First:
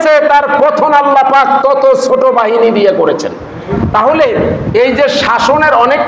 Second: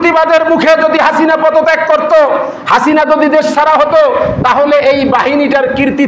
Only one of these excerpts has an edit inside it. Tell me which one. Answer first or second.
first